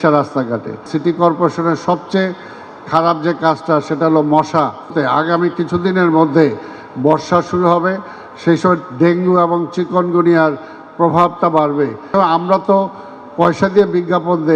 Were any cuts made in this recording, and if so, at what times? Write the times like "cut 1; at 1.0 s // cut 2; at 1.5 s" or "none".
cut 1; at 0.9 s // cut 2; at 4.9 s // cut 3; at 12.1 s